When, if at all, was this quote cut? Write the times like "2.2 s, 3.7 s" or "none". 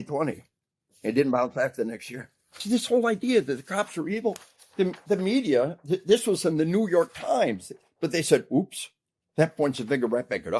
2.5 s